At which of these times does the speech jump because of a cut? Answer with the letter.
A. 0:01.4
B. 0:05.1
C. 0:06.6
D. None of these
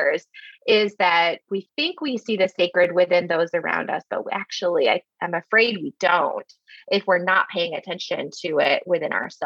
A